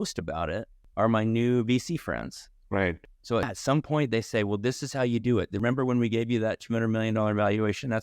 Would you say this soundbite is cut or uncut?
cut